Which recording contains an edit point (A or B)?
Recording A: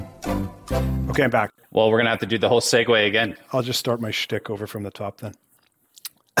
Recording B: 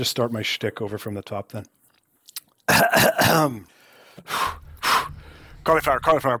A